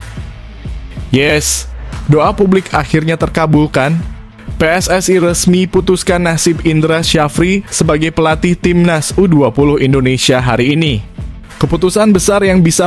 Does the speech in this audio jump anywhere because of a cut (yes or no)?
no